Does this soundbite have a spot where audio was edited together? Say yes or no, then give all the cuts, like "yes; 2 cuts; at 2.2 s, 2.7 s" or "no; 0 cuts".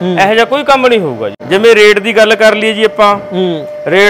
yes; 1 cut; at 1.3 s